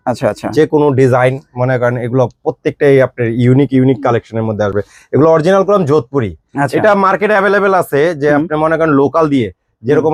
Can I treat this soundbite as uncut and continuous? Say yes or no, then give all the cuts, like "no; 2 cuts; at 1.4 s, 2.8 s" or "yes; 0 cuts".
yes; 0 cuts